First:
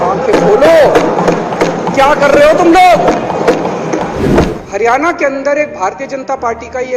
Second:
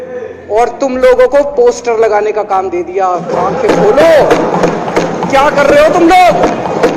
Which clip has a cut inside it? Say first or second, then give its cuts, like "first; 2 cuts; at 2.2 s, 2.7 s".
first; 1 cut; at 4.6 s